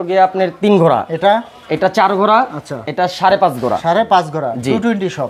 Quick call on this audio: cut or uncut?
uncut